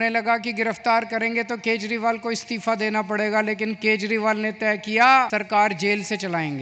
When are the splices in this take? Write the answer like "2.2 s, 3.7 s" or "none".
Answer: 5.3 s